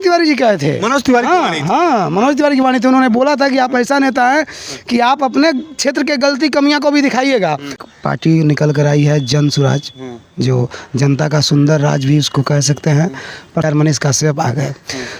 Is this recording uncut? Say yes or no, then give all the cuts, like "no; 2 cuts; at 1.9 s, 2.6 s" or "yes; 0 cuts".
no; 2 cuts; at 7.8 s, 13.6 s